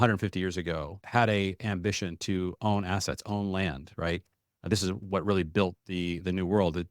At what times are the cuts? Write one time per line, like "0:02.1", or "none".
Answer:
0:01.0